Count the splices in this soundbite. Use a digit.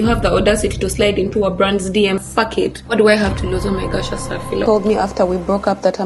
2